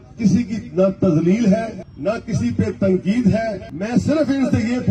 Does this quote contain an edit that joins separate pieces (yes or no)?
yes